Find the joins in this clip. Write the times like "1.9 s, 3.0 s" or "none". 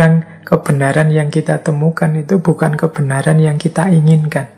none